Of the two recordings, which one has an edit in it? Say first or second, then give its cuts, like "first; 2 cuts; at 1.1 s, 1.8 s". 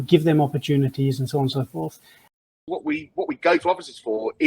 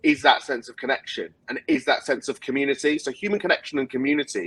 first; 1 cut; at 2.4 s